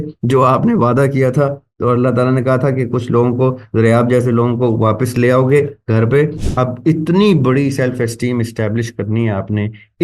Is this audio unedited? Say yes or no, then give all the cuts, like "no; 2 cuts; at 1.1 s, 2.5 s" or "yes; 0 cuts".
no; 1 cut; at 6.4 s